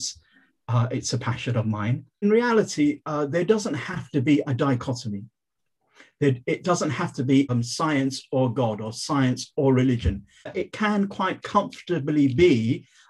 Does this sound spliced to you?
yes; 3 cuts; at 2.2 s, 7.5 s, 10.5 s

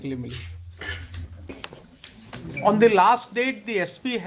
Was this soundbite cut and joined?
yes; 1 cut; at 1.5 s

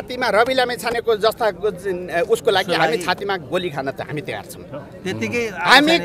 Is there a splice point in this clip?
no; 0 cuts

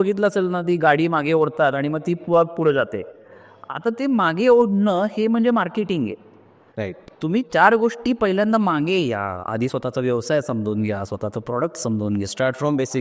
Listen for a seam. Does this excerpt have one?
no; 0 cuts

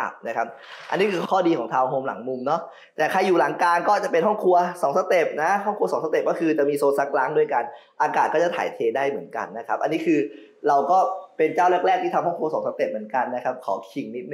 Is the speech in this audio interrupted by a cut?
no; 0 cuts

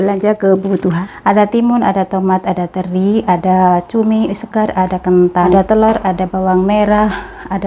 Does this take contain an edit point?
yes; 2 cuts; at 1.0 s, 5.5 s

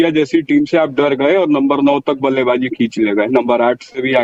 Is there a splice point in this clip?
no; 0 cuts

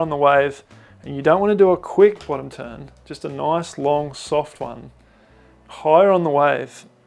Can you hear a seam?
no; 0 cuts

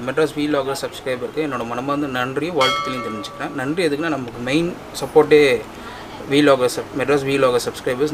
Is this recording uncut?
yes; 0 cuts

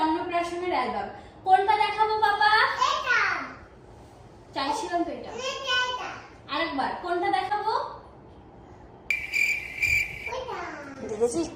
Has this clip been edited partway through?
no; 0 cuts

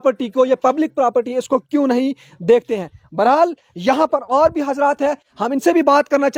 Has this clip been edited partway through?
no; 0 cuts

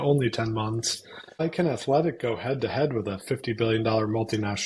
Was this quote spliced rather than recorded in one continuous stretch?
yes; 1 cut; at 1.4 s

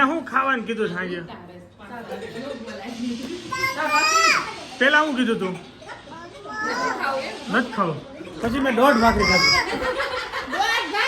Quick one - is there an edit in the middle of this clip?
no; 0 cuts

